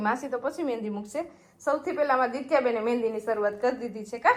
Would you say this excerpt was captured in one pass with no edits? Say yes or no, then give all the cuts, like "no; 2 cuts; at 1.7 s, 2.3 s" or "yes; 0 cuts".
yes; 0 cuts